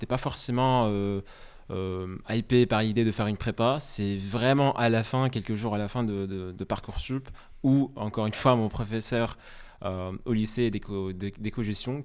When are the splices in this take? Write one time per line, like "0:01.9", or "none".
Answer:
none